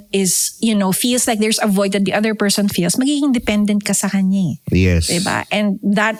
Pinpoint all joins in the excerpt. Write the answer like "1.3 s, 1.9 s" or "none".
none